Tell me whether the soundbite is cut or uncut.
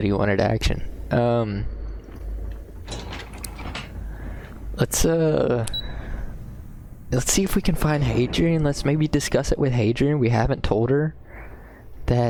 uncut